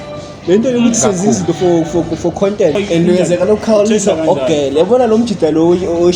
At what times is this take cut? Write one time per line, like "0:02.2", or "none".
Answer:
0:02.8